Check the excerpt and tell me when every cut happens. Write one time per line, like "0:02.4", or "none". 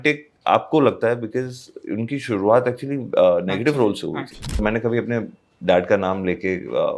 0:04.6